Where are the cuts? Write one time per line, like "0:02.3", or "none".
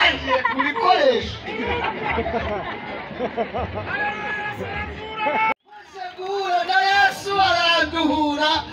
0:05.8